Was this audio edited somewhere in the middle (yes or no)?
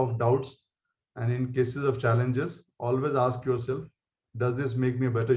no